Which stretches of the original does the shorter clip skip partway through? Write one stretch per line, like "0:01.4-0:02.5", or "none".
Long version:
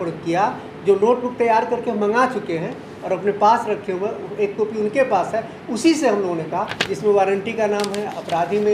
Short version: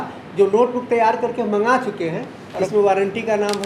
0:03.0-0:06.8

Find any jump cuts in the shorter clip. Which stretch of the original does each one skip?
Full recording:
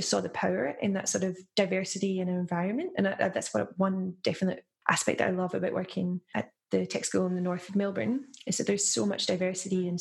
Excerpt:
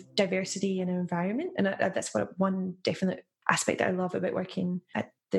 none

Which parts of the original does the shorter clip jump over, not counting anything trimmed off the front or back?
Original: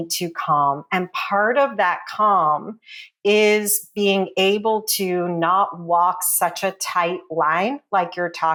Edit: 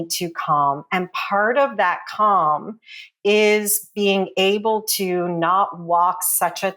none

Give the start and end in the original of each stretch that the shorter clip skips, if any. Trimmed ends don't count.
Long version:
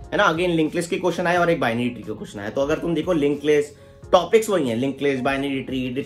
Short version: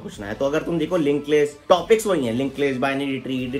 0:03.7-0:04.0

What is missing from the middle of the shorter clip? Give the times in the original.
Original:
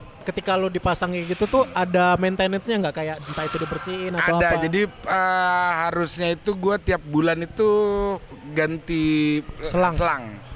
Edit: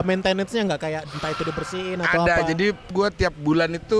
0:05.0-0:06.6

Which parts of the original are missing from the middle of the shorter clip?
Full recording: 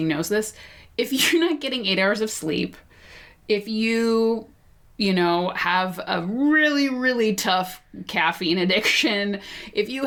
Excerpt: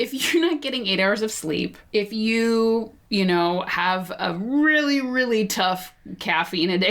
0:02.8-0:03.3
0:04.5-0:04.8

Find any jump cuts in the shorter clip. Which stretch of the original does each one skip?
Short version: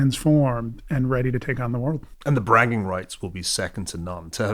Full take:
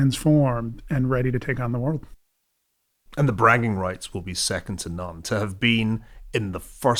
0:02.1-0:03.0

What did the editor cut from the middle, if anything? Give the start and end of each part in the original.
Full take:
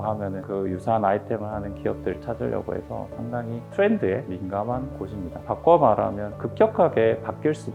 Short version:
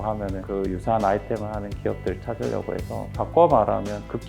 0:03.1-0:05.4

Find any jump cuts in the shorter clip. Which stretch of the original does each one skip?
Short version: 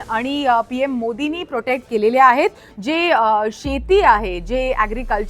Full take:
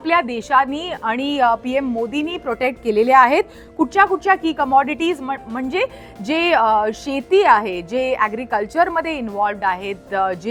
0:03.6-0:06.1

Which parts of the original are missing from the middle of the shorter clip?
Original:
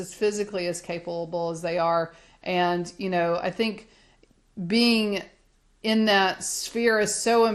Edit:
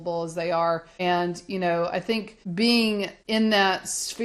0:02.2-0:02.4
0:03.9-0:04.5
0:05.3-0:05.7

